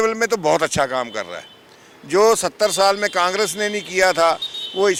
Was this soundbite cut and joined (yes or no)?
no